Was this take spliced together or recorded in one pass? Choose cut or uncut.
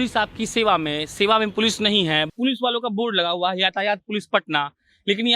cut